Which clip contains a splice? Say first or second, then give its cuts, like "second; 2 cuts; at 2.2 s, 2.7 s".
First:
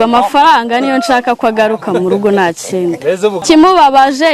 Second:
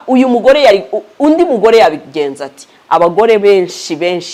first; 1 cut; at 3.4 s